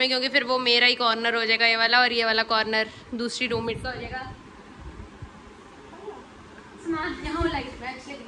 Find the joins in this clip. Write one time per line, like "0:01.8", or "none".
none

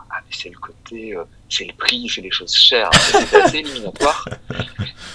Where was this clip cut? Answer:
none

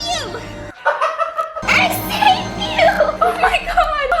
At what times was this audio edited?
none

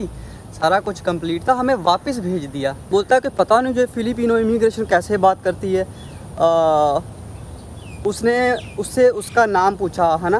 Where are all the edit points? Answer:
0:02.8

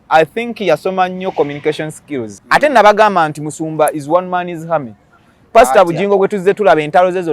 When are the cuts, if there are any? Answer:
0:02.4

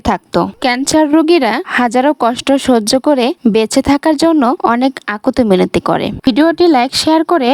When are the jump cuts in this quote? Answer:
0:06.3

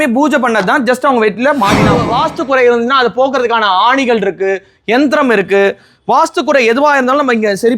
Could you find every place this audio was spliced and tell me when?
0:02.0

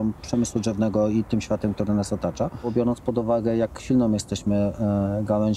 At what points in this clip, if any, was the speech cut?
0:02.6

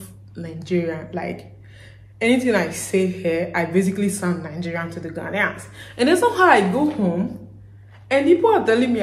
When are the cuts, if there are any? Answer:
none

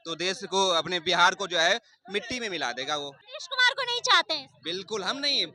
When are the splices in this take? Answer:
none

